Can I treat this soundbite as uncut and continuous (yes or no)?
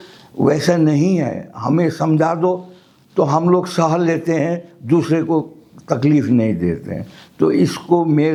yes